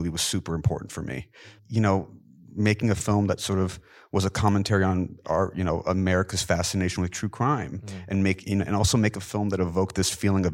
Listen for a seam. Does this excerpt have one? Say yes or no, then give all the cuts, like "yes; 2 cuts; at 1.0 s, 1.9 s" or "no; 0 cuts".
yes; 1 cut; at 1.6 s